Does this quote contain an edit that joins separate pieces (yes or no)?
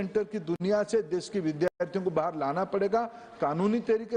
no